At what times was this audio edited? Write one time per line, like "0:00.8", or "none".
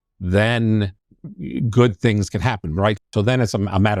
0:01.0
0:03.0